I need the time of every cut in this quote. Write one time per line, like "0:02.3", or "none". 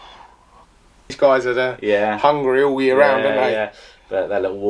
0:01.1